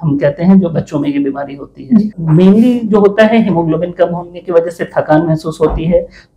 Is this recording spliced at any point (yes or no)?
yes